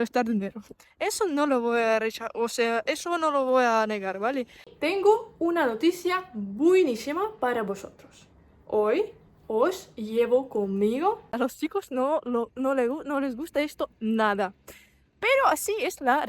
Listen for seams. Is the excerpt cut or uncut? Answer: cut